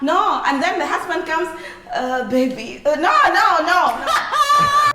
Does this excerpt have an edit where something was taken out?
yes; 1 cut; at 4.0 s

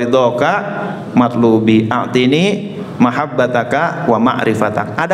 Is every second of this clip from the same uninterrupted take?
yes; 0 cuts

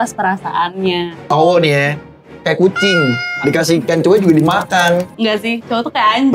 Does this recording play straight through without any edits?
no; 2 cuts; at 1.3 s, 5.1 s

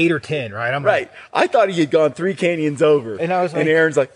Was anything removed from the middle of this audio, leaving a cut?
no; 0 cuts

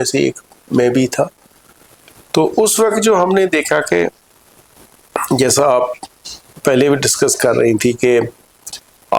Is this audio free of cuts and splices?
yes; 0 cuts

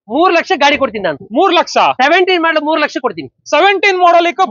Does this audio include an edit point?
no; 0 cuts

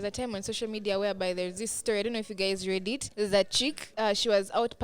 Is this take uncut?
no; 2 cuts; at 3.1 s, 3.8 s

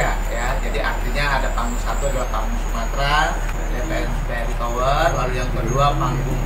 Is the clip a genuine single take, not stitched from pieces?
no; 1 cut; at 3.6 s

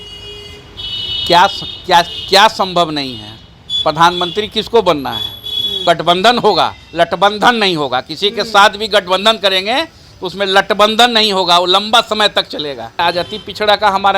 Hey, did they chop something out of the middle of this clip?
yes; 2 cuts; at 5.8 s, 13.0 s

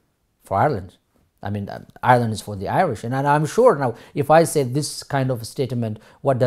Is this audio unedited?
yes; 0 cuts

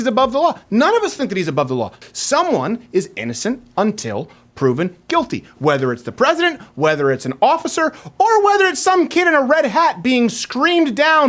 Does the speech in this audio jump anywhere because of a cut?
yes; 1 cut; at 1.9 s

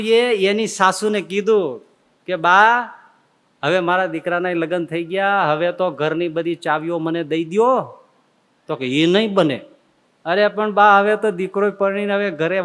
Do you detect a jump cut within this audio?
no; 0 cuts

